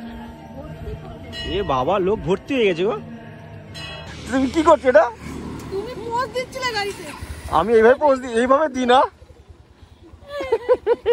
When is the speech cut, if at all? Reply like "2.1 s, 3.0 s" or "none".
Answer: 4.1 s